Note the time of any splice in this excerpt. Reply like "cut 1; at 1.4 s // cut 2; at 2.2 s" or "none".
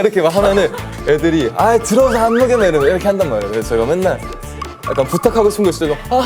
none